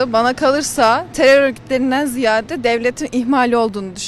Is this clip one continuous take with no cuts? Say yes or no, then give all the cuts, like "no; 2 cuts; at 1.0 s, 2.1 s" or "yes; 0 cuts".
yes; 0 cuts